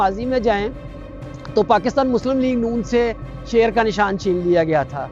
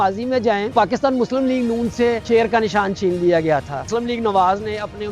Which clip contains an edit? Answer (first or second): second